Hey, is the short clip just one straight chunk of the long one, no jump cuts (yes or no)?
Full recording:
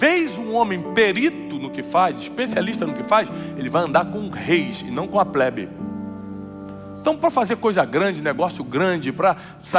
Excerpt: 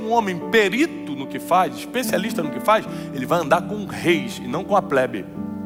yes